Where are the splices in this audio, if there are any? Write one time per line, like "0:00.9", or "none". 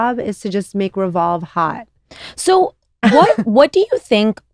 none